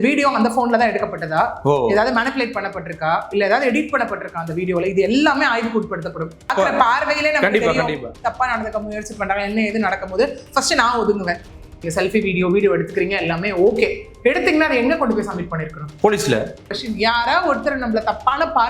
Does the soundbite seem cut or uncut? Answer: cut